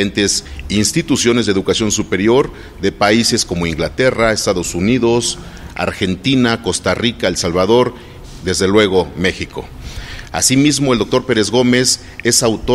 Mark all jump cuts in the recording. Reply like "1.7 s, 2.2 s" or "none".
none